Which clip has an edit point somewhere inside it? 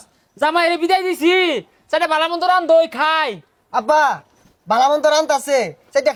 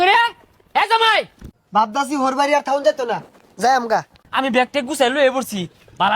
second; 2 cuts; at 1.4 s, 4.2 s

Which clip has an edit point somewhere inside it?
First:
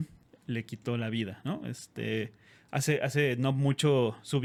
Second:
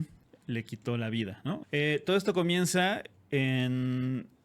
second; 1 cut; at 1.6 s

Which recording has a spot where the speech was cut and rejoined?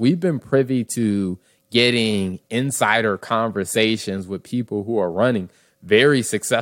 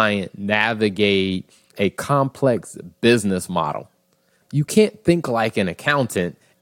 second; 2 cuts; at 1.7 s, 4.4 s

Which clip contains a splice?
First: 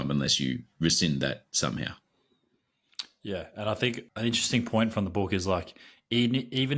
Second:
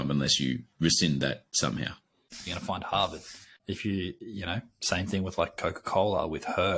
second; 2 cuts; at 2.4 s, 3.5 s

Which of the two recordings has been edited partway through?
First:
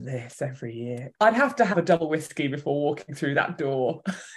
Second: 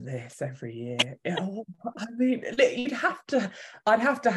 first; 1 cut; at 1.0 s

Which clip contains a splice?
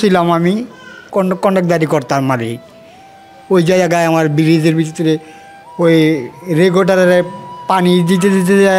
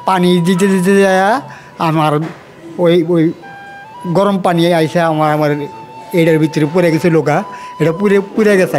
first; 1 cut; at 1.1 s

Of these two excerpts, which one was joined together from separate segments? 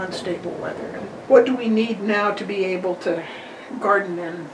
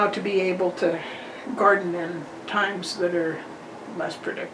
first; 1 cut; at 1.1 s

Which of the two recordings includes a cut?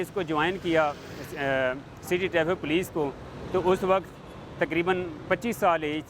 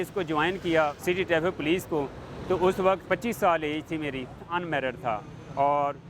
second; 3 cuts; at 1.0 s, 3.0 s, 4.4 s

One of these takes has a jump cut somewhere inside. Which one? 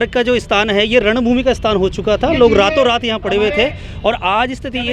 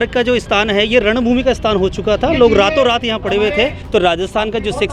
second; 1 cut; at 3.8 s

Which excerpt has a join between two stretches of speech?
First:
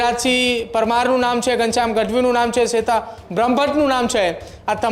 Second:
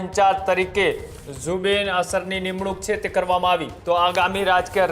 second; 1 cut; at 3.7 s

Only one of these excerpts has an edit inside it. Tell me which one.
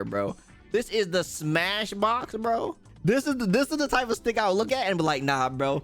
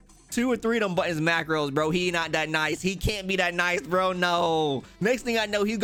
first; 2 cuts; at 2.8 s, 4.7 s

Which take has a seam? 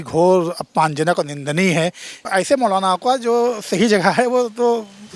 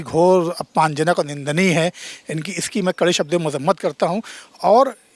first; 1 cut; at 2.1 s

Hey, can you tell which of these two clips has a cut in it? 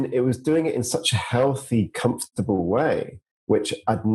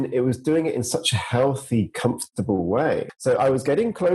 second; 1 cut; at 3.1 s

